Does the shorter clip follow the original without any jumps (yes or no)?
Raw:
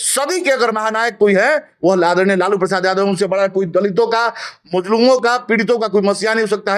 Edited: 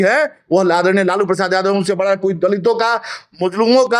yes